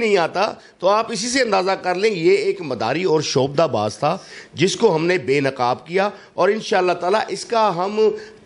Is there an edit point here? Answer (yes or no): no